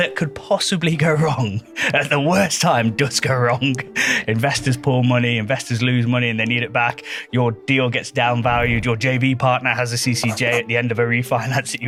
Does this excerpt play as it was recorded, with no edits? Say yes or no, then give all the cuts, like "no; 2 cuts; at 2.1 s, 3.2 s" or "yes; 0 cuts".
yes; 0 cuts